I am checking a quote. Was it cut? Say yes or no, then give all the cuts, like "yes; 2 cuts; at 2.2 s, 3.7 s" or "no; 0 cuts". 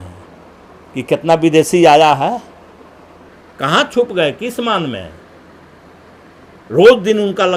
no; 0 cuts